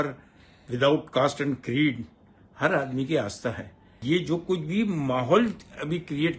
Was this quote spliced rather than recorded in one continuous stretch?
yes; 1 cut; at 4.0 s

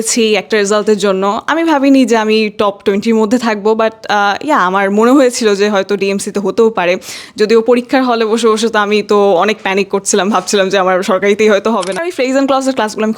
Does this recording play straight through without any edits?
no; 1 cut; at 12.1 s

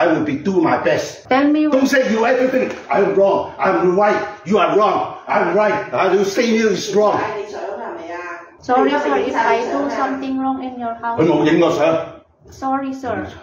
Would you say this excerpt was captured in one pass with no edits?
no; 1 cut; at 1.1 s

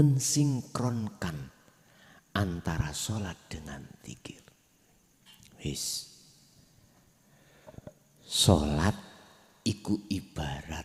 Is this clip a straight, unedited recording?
yes; 0 cuts

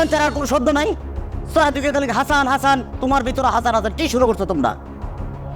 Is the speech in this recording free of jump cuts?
yes; 0 cuts

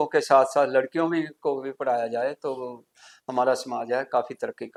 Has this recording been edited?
no; 0 cuts

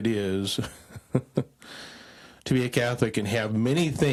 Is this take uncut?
yes; 0 cuts

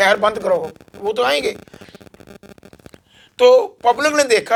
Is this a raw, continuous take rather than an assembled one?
yes; 0 cuts

